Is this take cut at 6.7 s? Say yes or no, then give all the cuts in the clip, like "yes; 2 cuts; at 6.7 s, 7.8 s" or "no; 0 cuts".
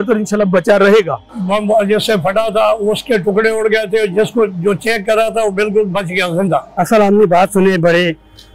yes; 2 cuts; at 1.2 s, 6.7 s